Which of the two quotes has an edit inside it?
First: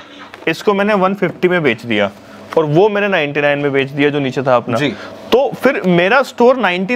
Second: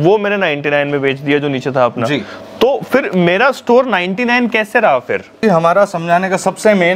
second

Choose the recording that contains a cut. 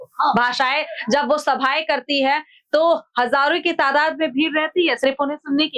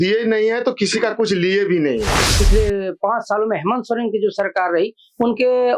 second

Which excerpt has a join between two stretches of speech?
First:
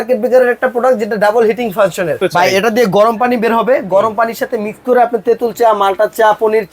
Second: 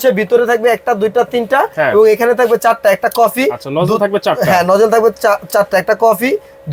first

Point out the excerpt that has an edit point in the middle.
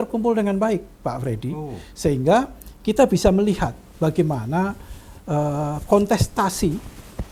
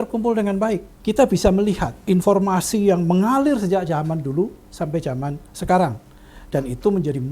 second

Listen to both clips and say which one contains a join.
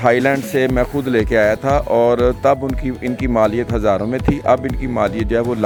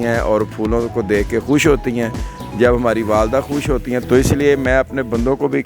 second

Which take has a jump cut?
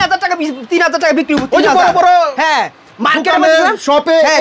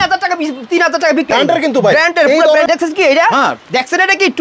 second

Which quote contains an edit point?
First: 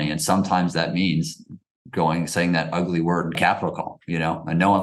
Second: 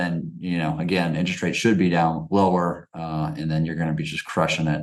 first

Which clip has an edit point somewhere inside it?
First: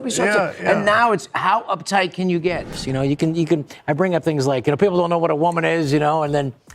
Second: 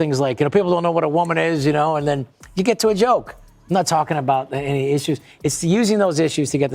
first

